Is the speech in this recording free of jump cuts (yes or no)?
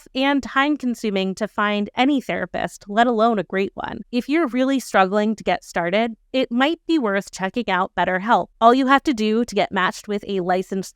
no